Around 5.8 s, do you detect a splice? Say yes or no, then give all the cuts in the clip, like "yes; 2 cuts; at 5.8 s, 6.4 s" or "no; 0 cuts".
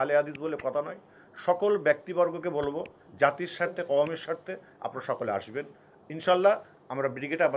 no; 0 cuts